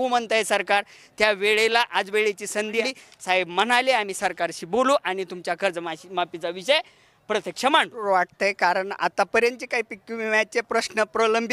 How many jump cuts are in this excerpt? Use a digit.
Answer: 2